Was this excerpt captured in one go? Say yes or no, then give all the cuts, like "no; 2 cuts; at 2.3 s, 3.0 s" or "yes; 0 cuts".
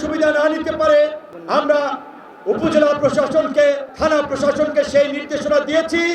no; 2 cuts; at 1.3 s, 3.9 s